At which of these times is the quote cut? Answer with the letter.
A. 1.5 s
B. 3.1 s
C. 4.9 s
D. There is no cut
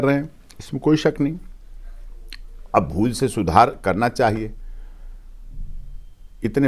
D